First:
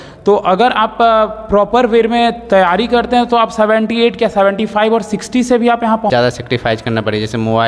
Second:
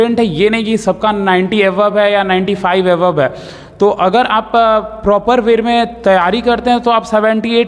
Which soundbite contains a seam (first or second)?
first